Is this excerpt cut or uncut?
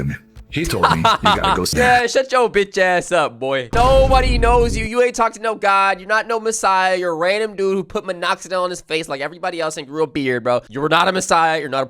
cut